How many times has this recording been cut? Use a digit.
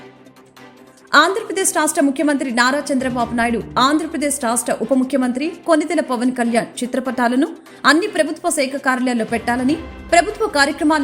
1